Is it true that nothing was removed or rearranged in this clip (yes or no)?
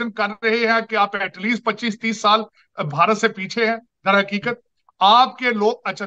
yes